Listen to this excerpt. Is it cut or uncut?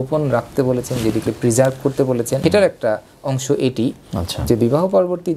cut